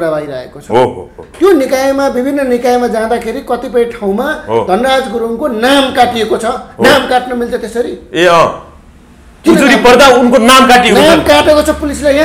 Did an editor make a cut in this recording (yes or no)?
no